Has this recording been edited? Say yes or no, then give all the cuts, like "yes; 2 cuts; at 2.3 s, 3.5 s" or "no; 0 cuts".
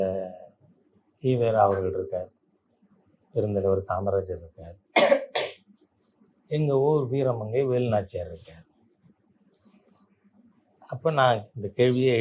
no; 0 cuts